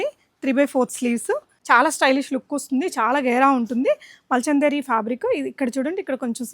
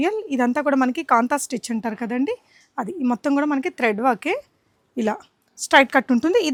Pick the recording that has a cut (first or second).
first